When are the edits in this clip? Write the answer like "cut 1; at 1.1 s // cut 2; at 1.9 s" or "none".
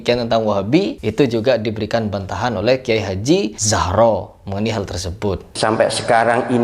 cut 1; at 1.0 s // cut 2; at 3.6 s // cut 3; at 5.4 s